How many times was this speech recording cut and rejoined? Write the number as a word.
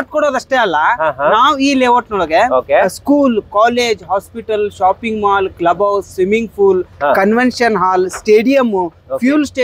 zero